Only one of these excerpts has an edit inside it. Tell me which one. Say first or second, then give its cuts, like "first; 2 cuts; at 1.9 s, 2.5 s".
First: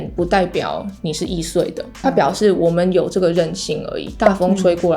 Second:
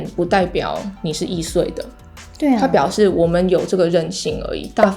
first; 1 cut; at 2.0 s